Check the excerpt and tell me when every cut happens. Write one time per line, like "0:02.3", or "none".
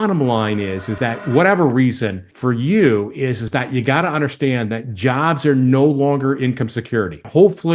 none